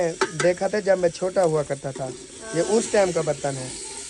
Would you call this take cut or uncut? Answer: uncut